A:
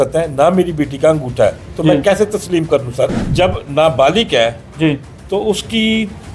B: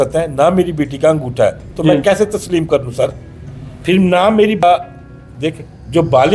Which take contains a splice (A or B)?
A